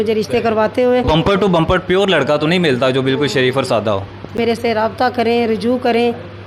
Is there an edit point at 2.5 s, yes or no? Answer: no